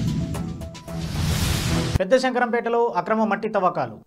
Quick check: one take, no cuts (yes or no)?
no